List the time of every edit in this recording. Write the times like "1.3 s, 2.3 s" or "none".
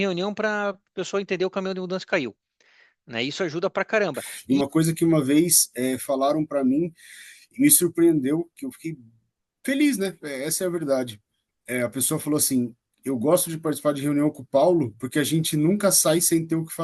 4.3 s

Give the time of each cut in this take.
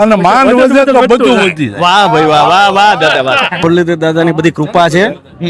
3.6 s

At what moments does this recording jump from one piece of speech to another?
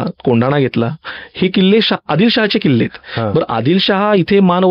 none

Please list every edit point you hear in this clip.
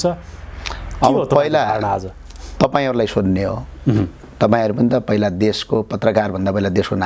none

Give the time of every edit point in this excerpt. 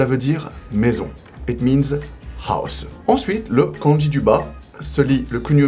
2.8 s

